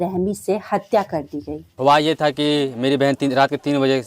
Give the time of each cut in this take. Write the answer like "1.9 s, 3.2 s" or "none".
1.6 s